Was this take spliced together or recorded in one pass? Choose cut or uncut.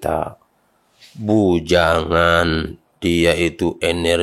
uncut